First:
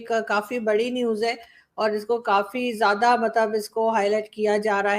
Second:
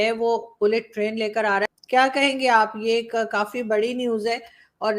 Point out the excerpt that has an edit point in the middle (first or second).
second